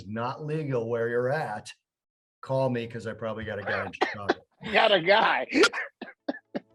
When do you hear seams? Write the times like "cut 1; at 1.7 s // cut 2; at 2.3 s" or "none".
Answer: none